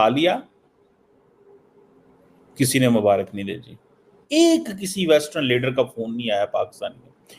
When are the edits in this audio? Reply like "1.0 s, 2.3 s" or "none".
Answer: 4.1 s